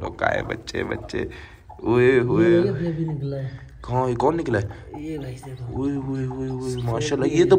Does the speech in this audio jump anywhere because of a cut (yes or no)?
no